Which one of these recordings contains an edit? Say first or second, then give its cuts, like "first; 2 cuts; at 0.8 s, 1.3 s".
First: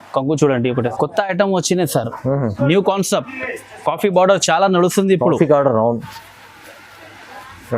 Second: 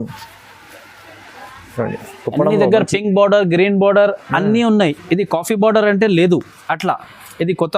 first; 1 cut; at 0.9 s